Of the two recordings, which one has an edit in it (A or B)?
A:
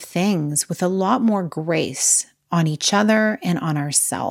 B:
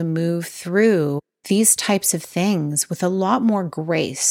B